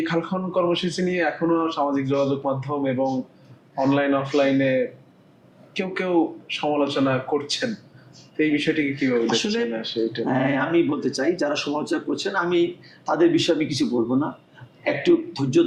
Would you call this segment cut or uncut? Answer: uncut